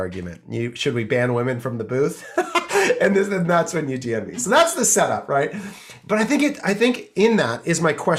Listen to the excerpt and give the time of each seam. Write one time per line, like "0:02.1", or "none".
none